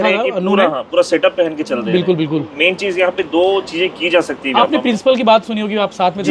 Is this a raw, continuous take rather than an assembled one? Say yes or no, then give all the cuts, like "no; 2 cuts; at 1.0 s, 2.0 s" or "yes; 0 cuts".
yes; 0 cuts